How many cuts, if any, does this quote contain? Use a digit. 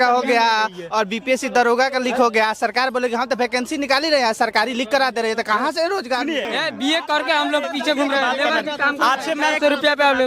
1